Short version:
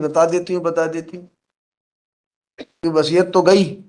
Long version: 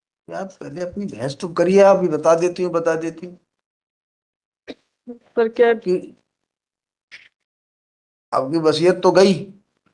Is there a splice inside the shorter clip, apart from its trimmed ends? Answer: yes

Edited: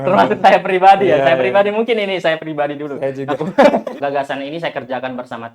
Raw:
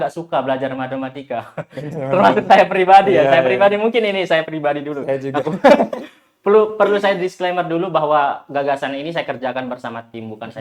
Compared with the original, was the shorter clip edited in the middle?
yes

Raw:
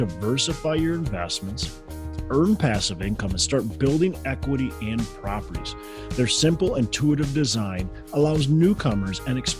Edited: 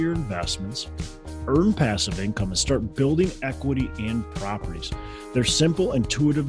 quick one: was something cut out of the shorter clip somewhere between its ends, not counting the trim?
no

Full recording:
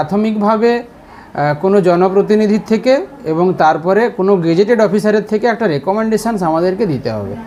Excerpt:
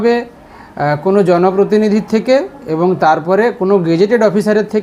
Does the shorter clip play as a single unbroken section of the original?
yes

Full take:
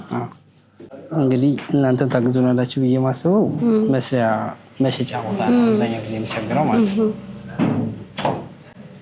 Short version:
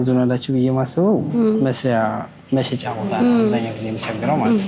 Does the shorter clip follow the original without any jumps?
yes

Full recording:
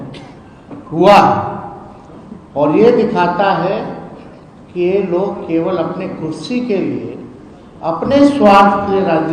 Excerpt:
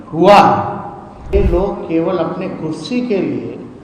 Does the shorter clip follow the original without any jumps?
no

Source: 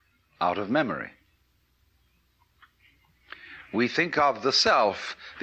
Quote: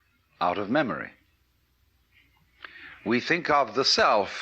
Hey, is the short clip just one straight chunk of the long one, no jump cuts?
no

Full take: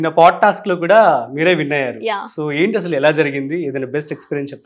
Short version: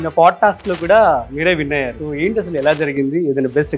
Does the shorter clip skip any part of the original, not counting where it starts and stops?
yes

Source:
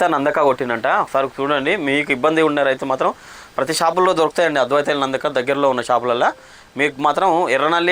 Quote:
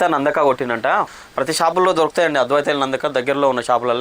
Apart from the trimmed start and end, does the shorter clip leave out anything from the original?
yes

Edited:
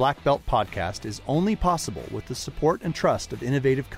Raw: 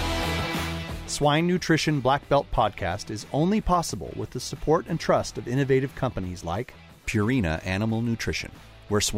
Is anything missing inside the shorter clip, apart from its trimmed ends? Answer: no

